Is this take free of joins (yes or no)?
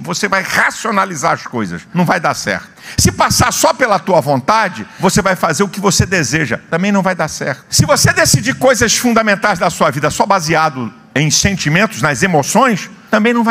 yes